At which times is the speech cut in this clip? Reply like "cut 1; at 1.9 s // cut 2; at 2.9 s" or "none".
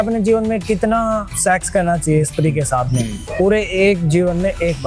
cut 1; at 1.3 s // cut 2; at 3.2 s